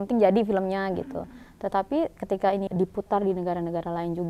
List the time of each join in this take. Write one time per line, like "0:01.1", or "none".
0:02.7